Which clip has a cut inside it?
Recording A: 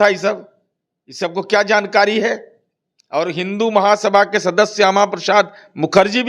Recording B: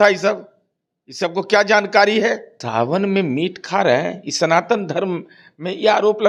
B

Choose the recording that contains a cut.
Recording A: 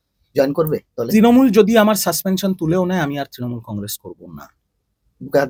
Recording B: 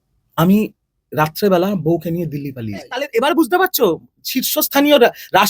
B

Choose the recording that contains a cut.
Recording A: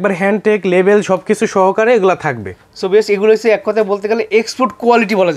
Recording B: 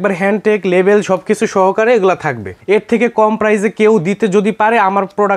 B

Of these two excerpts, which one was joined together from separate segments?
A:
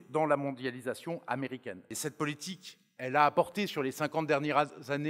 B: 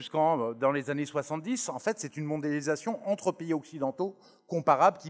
A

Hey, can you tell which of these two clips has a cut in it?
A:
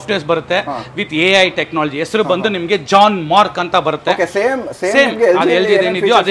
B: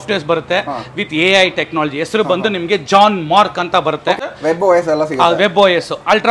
B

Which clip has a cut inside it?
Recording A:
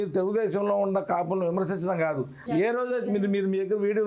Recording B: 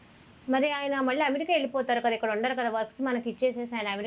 A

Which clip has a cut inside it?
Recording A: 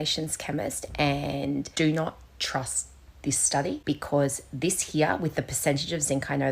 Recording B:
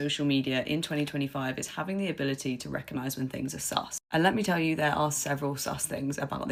A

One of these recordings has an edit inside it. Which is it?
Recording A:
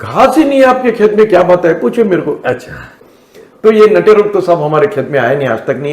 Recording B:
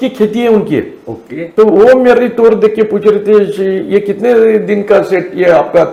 A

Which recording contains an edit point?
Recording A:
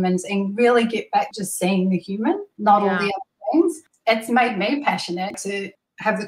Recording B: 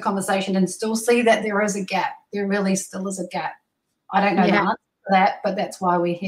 A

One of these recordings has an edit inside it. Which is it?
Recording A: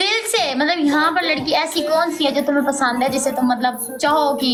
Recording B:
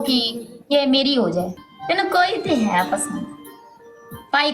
B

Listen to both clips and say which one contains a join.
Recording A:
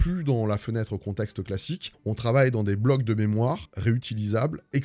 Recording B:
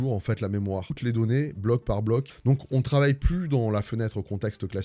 B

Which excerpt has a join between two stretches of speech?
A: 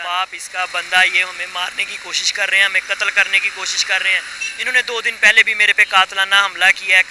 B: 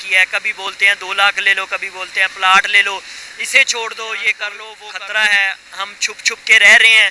B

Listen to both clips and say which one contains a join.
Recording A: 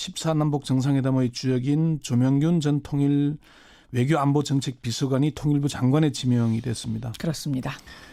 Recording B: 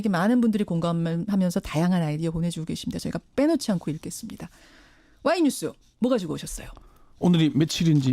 B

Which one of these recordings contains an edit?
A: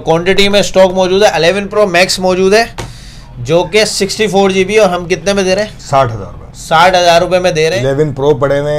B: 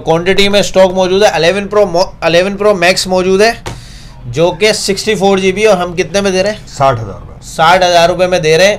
A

